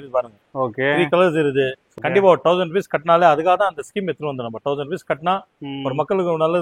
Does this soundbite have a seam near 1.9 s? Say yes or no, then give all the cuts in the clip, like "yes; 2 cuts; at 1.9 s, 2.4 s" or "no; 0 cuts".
yes; 1 cut; at 1.9 s